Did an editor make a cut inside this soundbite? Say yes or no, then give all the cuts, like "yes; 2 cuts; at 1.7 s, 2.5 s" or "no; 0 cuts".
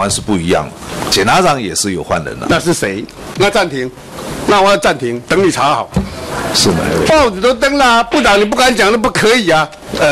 yes; 1 cut; at 3.3 s